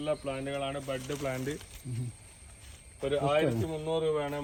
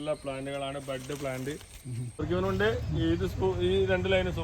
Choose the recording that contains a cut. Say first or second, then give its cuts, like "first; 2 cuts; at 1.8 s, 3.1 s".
second; 1 cut; at 2.2 s